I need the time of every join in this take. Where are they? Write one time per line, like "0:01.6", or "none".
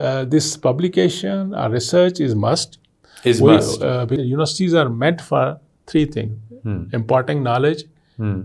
0:04.1